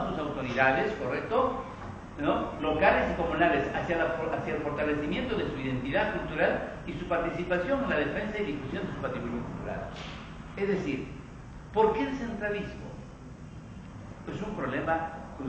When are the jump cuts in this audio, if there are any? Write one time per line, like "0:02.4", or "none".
0:06.6